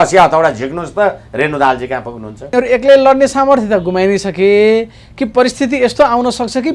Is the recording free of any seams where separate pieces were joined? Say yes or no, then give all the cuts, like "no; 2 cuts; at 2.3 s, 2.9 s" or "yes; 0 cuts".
no; 1 cut; at 2.5 s